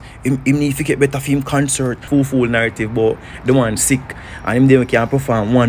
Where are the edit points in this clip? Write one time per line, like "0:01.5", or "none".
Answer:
0:02.0